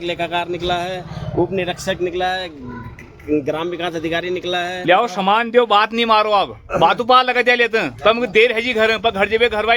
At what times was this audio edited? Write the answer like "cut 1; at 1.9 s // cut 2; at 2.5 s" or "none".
cut 1; at 4.8 s